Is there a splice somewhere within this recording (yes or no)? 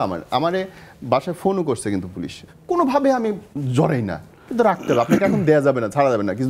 yes